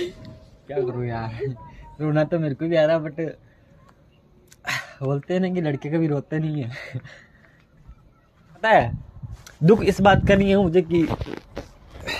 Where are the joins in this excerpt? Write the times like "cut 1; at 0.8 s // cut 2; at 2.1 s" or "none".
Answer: cut 1; at 8.6 s

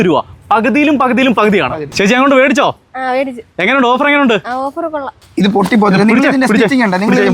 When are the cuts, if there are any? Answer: cut 1; at 1.8 s // cut 2; at 5.1 s

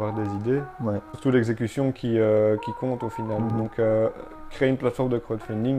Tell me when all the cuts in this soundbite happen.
cut 1; at 1.1 s

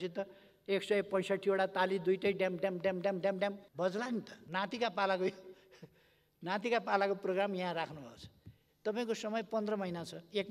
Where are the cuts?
cut 1; at 3.6 s // cut 2; at 4.4 s

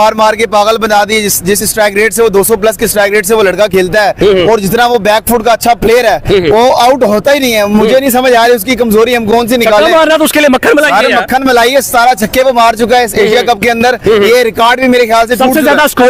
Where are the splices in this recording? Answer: none

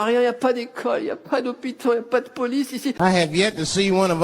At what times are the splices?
cut 1; at 2.9 s

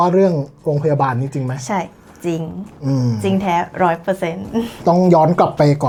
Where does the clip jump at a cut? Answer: none

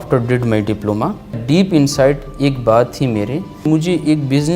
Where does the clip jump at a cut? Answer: cut 1; at 1.4 s // cut 2; at 3.6 s

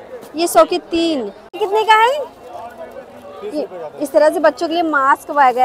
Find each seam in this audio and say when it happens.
cut 1; at 1.6 s

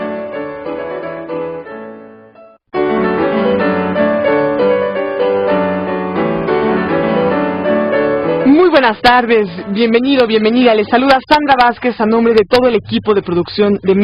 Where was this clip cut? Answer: none

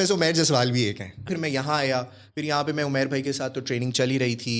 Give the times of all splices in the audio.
cut 1; at 1.3 s

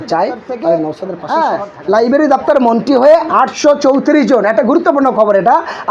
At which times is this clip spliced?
cut 1; at 1.1 s

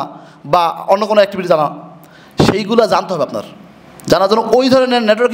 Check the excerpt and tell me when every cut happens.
none

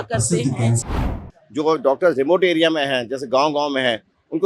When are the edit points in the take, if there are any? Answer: cut 1; at 1.0 s

